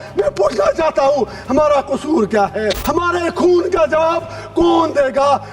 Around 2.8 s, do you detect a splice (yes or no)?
yes